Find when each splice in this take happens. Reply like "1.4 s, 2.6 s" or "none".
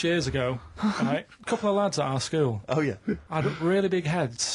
1.3 s, 3.2 s

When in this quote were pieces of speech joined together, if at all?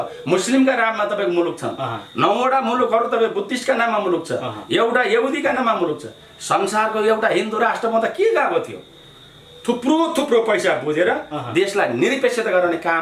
none

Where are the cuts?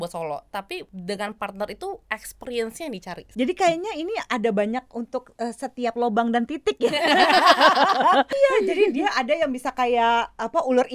0.9 s, 3.2 s, 8.3 s

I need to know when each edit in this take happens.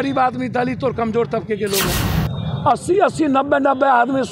2.3 s

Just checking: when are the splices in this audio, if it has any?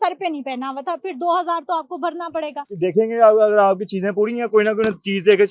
2.7 s

